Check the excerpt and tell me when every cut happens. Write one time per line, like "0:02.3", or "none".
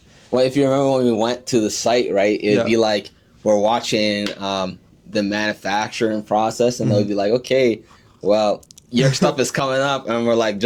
none